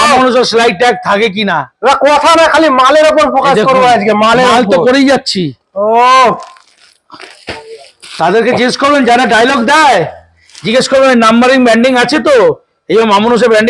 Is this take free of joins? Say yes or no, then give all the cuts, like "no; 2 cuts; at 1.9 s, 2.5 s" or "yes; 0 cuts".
yes; 0 cuts